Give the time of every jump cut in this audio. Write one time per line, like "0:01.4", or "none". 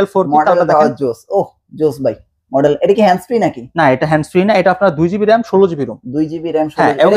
none